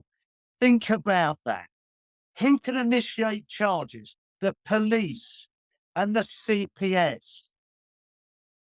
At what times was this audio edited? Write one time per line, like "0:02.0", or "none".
none